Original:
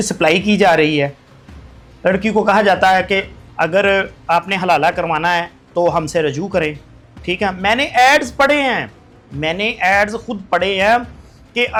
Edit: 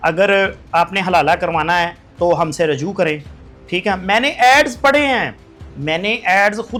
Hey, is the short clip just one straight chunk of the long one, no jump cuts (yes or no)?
yes